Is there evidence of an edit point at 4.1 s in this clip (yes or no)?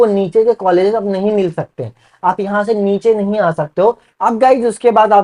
yes